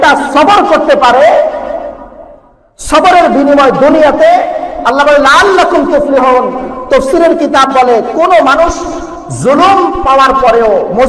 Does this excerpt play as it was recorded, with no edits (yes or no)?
yes